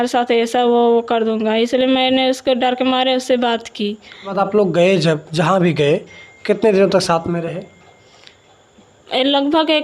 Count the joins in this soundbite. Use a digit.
1